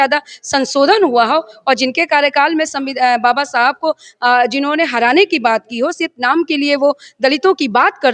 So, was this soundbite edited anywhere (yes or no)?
no